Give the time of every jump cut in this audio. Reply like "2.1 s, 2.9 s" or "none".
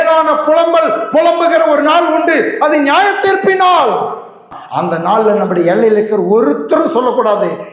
4.6 s